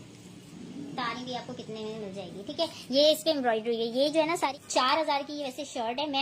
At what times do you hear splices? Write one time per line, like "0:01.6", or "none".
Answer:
0:04.5